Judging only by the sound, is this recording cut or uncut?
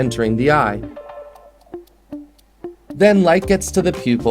cut